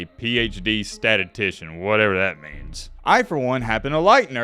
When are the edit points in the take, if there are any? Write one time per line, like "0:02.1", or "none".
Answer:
0:02.8